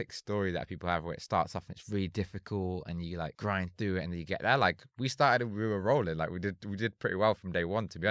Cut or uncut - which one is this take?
cut